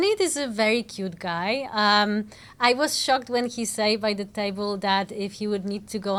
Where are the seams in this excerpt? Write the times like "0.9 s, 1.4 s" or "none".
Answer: none

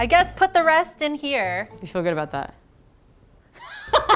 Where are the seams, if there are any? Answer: none

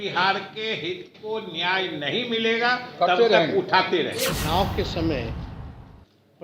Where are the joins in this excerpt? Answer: 4.3 s

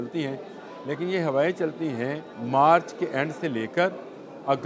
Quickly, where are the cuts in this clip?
2.3 s

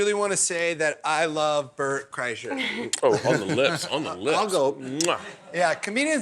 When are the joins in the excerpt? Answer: none

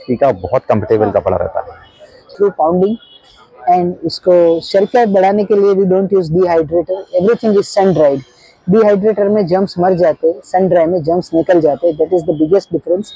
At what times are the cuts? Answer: 2.3 s

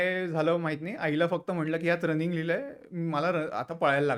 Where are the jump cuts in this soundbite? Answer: none

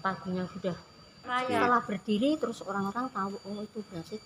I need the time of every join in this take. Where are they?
1.4 s

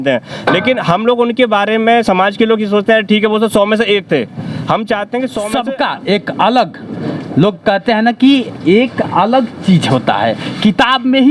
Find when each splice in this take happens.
5.5 s

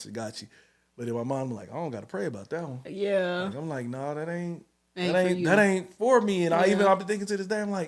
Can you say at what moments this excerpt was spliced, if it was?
none

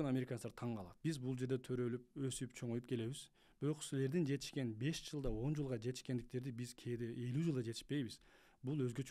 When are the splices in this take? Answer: 0.9 s

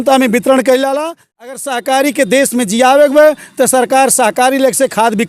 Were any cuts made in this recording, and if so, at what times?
1.6 s

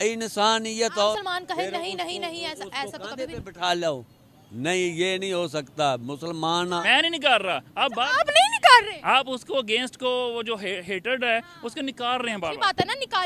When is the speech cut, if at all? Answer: 1.2 s, 6.8 s

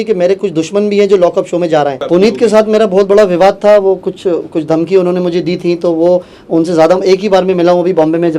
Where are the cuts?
2.0 s

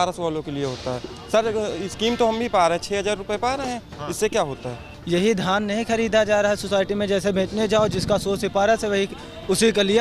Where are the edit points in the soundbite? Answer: 4.9 s

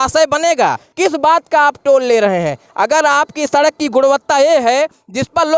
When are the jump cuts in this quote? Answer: 0.9 s

